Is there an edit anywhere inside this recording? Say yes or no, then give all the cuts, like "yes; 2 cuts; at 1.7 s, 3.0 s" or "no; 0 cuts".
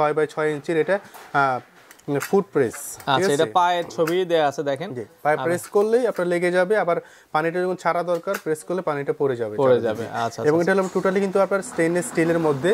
no; 0 cuts